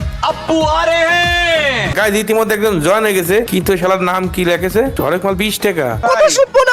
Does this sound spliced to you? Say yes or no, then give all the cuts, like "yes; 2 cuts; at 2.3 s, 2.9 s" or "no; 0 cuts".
yes; 4 cuts; at 1.9 s, 3.5 s, 4.9 s, 6.0 s